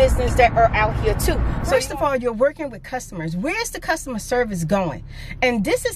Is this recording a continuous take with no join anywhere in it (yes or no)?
no